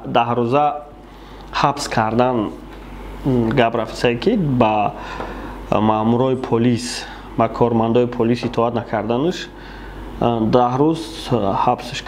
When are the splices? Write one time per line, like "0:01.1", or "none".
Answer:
none